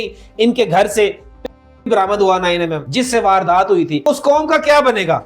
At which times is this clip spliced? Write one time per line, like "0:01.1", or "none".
0:02.8
0:04.0